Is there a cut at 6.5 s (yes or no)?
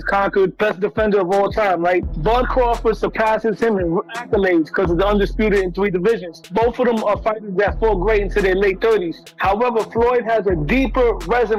no